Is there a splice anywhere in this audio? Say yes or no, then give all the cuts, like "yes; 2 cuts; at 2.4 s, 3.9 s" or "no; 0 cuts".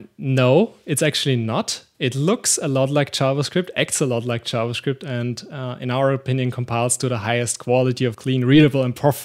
no; 0 cuts